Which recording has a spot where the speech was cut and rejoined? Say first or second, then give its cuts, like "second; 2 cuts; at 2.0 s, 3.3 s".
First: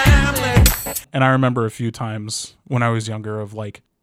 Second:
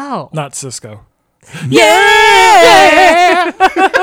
first; 1 cut; at 1.0 s